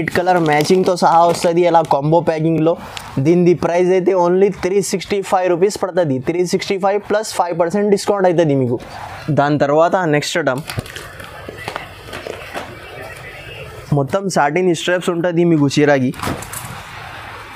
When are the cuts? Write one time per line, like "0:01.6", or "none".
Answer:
none